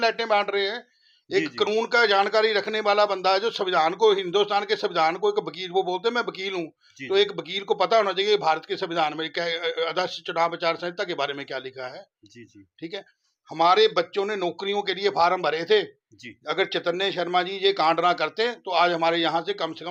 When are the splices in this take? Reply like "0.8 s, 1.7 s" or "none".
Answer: none